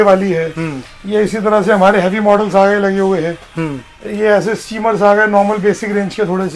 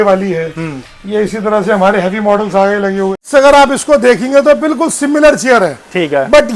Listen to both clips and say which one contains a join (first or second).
second